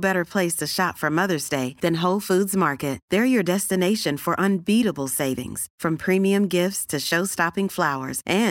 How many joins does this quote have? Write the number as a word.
zero